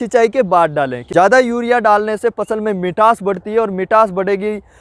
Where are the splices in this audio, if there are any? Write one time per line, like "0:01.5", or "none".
0:01.1